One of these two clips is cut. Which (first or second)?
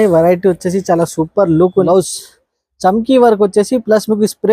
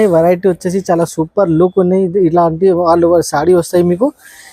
first